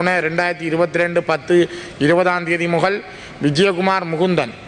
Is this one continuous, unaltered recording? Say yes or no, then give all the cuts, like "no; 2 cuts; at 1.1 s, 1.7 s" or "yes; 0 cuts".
yes; 0 cuts